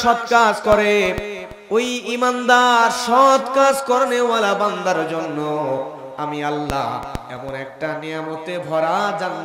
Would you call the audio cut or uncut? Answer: uncut